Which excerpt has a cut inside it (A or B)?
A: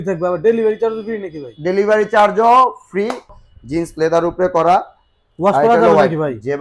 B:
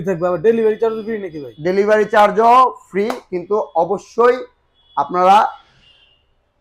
A